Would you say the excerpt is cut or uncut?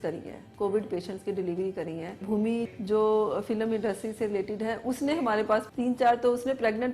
cut